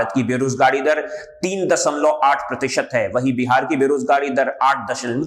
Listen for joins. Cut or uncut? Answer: uncut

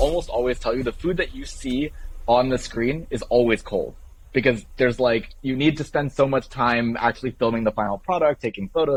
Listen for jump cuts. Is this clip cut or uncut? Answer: uncut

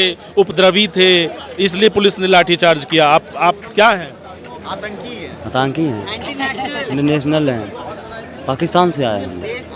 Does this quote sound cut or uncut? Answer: uncut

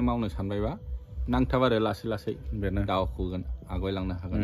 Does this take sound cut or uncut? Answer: uncut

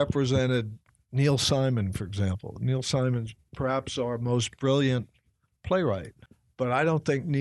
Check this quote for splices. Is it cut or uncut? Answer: uncut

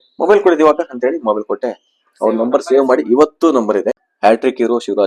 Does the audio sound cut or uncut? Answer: cut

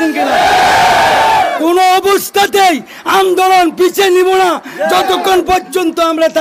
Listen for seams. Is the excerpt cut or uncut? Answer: uncut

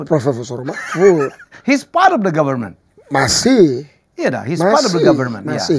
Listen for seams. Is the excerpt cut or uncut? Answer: uncut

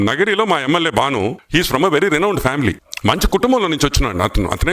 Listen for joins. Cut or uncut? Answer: cut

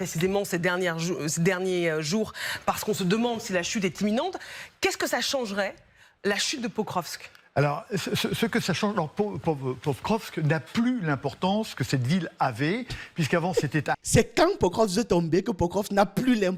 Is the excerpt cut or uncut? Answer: uncut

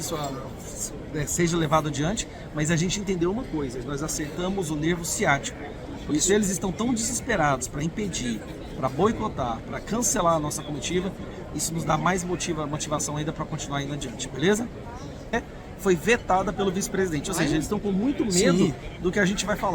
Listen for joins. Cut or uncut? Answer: cut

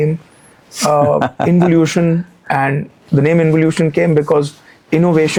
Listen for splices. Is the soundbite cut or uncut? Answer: uncut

